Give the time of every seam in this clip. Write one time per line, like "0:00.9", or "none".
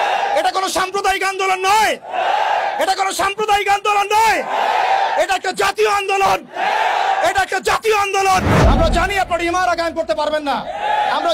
0:08.5